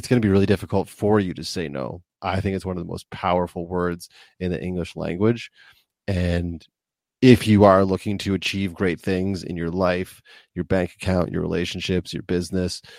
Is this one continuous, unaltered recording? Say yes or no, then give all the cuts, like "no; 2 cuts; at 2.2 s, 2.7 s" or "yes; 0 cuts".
no; 1 cut; at 2.0 s